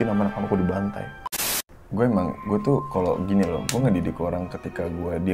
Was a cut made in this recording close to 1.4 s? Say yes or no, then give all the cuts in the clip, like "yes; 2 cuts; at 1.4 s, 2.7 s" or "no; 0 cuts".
yes; 1 cut; at 1.4 s